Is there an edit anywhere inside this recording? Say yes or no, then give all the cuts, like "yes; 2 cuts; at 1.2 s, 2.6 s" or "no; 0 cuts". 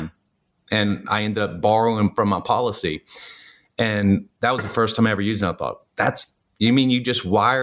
no; 0 cuts